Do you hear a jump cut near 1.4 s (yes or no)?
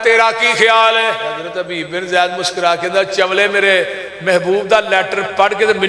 yes